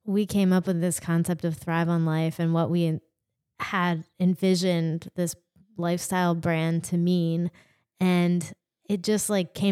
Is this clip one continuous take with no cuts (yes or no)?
yes